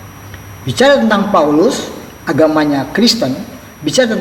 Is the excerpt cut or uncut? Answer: uncut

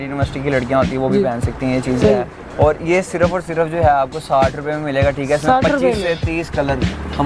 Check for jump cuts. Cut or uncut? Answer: uncut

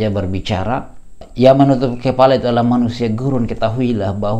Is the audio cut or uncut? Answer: cut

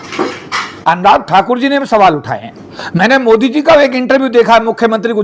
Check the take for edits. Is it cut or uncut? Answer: uncut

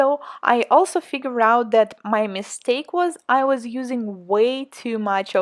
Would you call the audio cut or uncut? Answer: cut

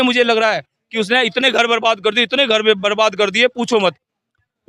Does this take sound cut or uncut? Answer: uncut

